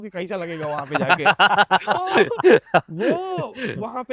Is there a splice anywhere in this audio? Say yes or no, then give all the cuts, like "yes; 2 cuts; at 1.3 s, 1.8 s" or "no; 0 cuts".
no; 0 cuts